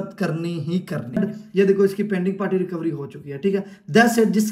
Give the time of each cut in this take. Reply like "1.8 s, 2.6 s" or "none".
1.2 s